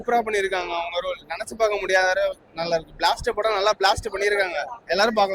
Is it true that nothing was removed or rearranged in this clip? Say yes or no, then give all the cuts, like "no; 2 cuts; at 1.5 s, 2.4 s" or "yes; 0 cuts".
yes; 0 cuts